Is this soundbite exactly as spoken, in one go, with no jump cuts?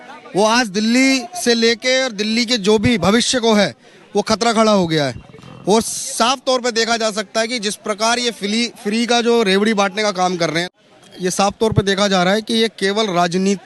yes; 0 cuts

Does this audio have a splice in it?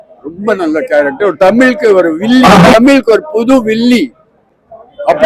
no; 0 cuts

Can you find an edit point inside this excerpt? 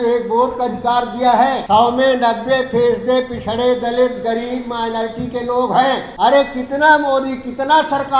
yes; 2 cuts; at 1.6 s, 6.1 s

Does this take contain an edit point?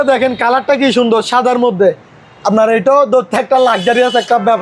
no; 0 cuts

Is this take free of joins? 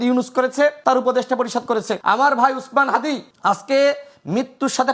no; 3 cuts; at 0.8 s, 1.9 s, 3.3 s

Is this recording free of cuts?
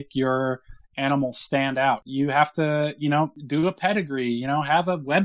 no; 2 cuts; at 2.1 s, 3.4 s

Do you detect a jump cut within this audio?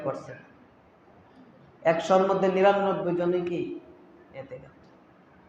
no; 0 cuts

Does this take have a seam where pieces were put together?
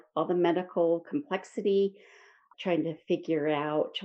no; 0 cuts

